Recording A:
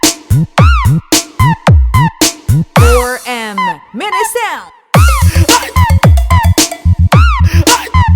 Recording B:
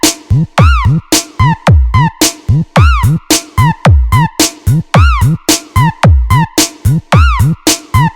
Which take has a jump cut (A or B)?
A